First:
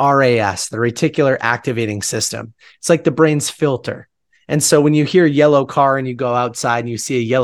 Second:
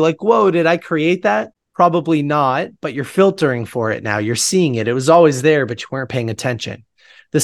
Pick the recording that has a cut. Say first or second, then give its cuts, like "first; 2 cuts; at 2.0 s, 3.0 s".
second; 1 cut; at 1.6 s